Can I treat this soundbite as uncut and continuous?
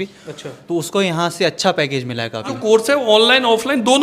no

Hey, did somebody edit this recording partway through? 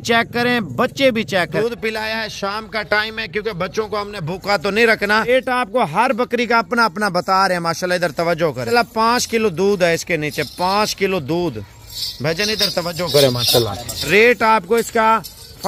yes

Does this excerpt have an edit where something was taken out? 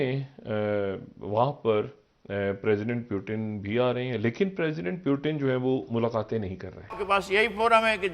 yes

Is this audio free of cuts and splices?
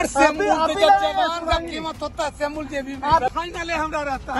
no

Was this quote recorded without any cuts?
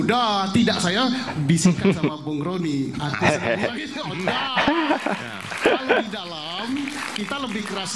yes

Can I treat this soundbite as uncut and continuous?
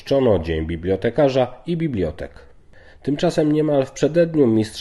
no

